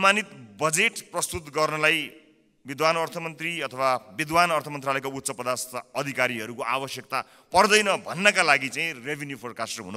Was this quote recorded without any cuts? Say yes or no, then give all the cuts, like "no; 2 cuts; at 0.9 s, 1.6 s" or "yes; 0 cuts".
yes; 0 cuts